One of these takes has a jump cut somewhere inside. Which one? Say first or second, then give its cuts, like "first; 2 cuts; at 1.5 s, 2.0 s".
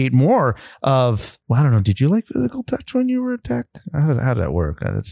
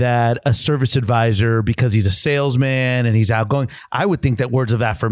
first; 1 cut; at 1.3 s